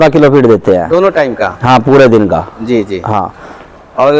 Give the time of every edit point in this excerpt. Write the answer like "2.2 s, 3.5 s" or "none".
none